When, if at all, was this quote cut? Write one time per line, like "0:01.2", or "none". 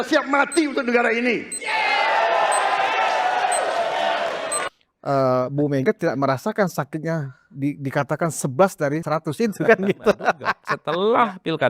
0:04.7
0:10.5

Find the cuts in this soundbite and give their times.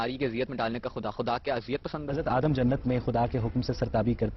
0:02.1

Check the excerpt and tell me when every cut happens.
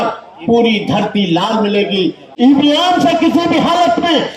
0:02.3

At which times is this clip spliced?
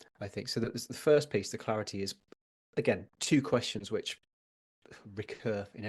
none

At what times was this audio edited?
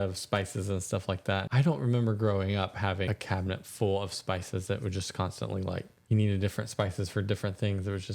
0:01.4
0:03.1
0:05.9

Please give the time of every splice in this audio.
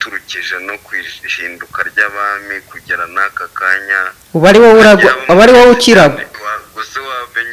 0:06.4

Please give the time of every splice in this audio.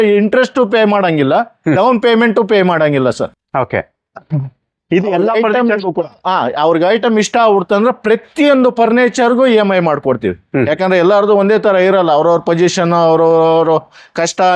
none

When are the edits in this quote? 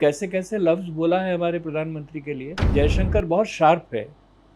0:02.5

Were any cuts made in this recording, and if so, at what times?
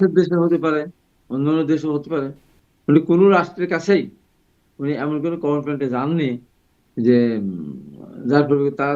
none

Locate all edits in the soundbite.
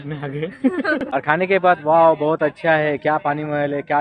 0:01.0

